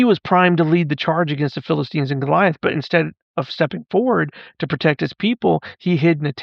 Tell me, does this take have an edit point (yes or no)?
no